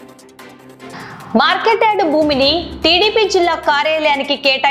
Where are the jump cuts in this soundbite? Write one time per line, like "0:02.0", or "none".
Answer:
0:00.9